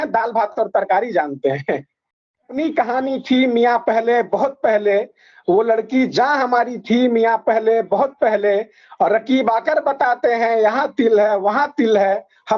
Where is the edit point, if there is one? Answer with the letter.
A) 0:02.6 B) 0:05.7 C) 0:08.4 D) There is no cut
A